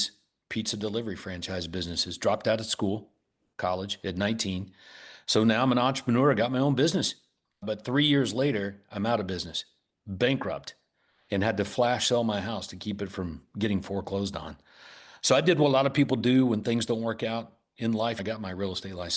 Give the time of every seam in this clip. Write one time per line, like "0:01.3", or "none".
0:18.2